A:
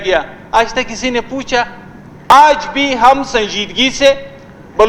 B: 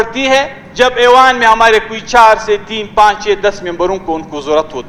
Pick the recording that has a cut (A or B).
A